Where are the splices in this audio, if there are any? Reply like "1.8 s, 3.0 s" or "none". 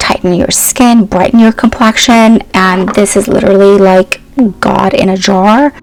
none